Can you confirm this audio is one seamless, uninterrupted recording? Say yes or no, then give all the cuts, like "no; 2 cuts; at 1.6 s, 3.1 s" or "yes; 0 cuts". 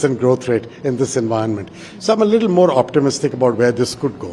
yes; 0 cuts